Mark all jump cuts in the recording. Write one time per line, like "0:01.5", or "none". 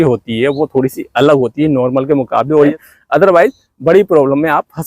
0:02.8